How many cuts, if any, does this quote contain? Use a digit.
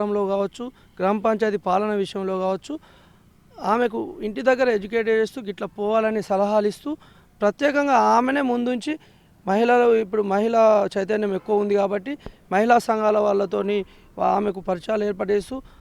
0